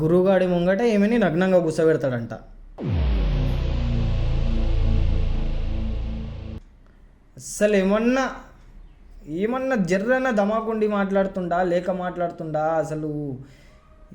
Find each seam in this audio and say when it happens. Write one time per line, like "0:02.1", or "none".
none